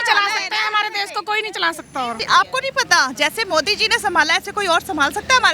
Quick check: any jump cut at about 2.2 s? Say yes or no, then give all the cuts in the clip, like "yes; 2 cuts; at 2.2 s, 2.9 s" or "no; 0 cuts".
yes; 1 cut; at 2.2 s